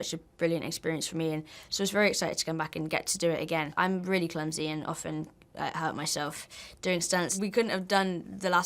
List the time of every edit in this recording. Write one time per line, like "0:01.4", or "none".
0:03.7
0:07.4